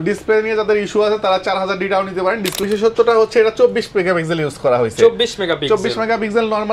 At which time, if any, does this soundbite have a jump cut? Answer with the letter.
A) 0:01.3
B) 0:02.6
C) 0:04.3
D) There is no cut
B